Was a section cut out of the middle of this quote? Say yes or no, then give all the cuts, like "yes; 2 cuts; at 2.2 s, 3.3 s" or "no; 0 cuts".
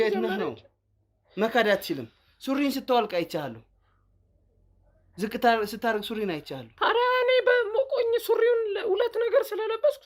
no; 0 cuts